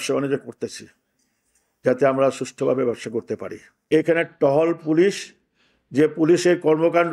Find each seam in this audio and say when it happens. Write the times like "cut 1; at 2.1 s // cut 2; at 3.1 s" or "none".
cut 1; at 3.9 s